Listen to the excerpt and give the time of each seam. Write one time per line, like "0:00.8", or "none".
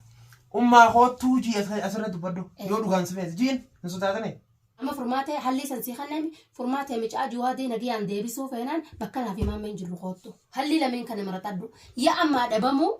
0:04.8